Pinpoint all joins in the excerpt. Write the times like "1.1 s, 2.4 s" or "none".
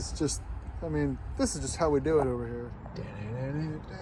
none